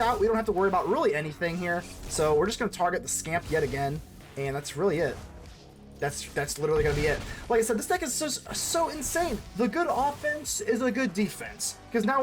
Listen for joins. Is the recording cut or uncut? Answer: cut